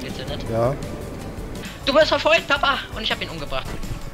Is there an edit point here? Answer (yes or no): yes